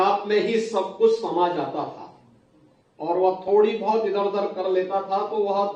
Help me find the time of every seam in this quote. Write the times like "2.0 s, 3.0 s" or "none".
none